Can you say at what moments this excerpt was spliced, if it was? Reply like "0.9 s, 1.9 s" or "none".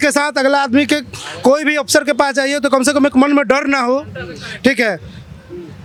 none